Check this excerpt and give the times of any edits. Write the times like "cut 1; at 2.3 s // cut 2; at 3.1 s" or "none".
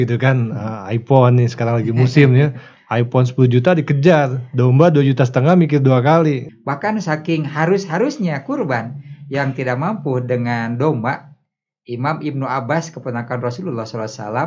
cut 1; at 6.5 s